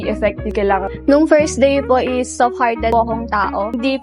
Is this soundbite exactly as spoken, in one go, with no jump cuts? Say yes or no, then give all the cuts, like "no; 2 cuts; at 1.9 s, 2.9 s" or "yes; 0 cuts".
no; 1 cut; at 0.9 s